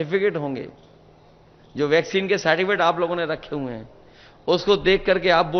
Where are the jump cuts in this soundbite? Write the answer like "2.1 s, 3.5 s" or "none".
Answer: none